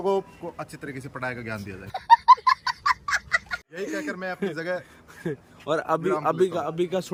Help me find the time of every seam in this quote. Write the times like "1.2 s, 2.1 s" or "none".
none